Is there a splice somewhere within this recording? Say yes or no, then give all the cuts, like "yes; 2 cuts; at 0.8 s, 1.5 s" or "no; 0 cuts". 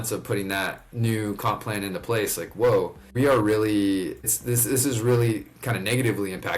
yes; 2 cuts; at 3.0 s, 4.3 s